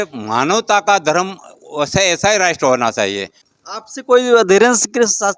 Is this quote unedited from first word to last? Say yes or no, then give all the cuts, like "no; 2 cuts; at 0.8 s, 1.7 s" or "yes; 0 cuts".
no; 1 cut; at 3.4 s